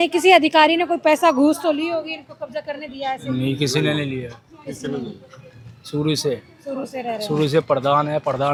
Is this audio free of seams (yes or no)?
yes